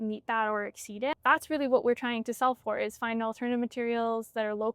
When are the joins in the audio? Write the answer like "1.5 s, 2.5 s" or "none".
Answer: 1.1 s